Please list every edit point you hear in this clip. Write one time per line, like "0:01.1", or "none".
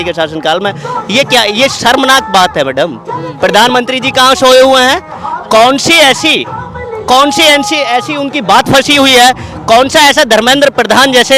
none